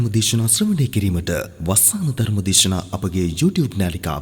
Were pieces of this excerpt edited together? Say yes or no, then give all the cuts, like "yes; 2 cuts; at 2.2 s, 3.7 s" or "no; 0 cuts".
no; 0 cuts